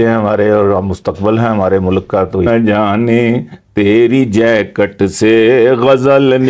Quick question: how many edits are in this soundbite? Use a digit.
1